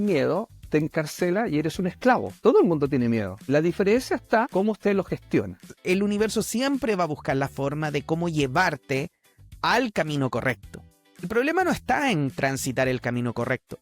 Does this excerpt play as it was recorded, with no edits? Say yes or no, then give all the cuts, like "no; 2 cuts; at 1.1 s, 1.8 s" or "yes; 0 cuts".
no; 5 cuts; at 2.4 s, 3.3 s, 4.5 s, 5.8 s, 11.3 s